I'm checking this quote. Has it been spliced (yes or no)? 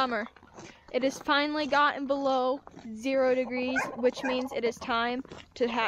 no